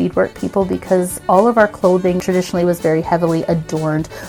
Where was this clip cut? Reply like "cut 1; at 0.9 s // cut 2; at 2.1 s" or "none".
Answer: cut 1; at 1.2 s // cut 2; at 2.2 s